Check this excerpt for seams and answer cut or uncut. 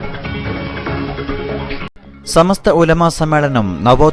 uncut